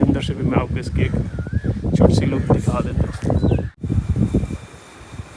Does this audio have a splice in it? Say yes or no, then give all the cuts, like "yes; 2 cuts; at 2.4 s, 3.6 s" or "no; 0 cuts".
yes; 1 cut; at 3.8 s